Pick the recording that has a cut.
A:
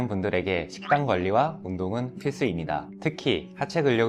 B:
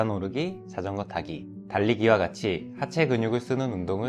A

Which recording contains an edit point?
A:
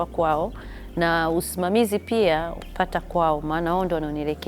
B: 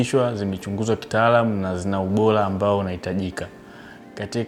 A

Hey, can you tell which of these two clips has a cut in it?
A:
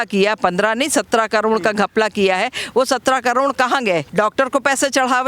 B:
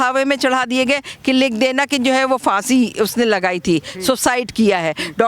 A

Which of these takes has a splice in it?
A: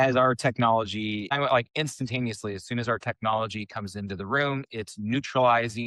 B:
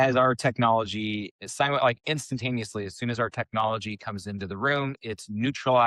A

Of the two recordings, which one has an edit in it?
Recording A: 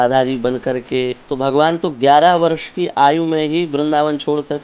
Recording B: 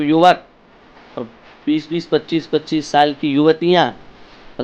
A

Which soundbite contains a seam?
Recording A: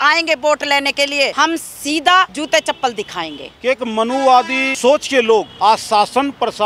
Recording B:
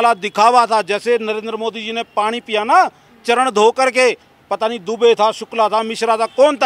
A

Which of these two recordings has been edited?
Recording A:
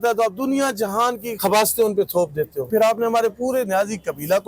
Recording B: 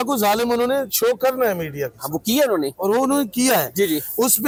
A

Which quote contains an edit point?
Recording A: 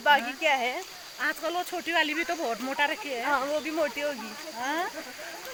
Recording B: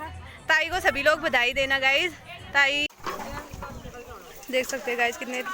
B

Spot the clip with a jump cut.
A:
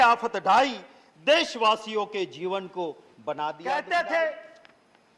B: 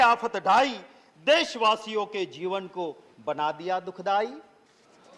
A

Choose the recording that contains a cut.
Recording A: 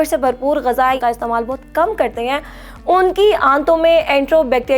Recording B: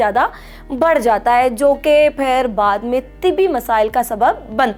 A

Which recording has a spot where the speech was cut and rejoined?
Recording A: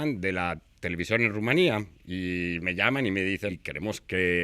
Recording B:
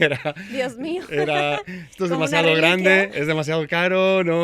A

